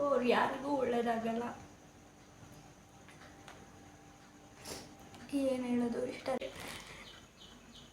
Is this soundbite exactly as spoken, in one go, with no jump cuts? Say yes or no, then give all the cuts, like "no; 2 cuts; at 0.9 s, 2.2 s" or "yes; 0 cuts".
no; 1 cut; at 6.4 s